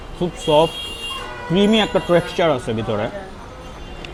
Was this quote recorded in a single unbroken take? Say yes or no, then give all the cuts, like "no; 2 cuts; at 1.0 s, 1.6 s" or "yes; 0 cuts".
yes; 0 cuts